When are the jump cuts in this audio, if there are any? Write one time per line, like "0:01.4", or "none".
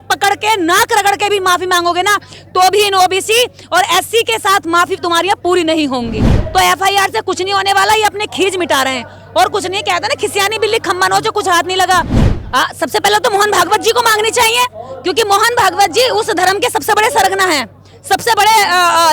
0:06.3
0:12.2